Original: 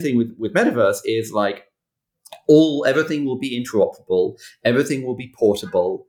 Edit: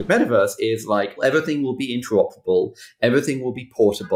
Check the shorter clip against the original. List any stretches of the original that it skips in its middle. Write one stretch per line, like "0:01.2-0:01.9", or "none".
0:01.6-0:02.8